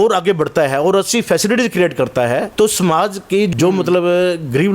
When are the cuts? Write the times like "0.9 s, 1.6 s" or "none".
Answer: 2.5 s, 3.5 s